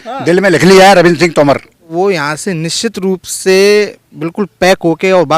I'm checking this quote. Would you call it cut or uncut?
cut